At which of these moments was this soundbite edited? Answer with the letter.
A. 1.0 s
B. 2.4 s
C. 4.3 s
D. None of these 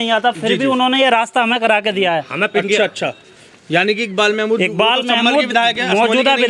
D